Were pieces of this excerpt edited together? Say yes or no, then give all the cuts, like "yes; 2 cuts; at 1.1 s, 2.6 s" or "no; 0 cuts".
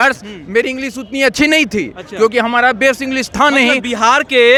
no; 0 cuts